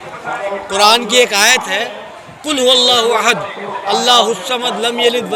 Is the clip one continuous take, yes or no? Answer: yes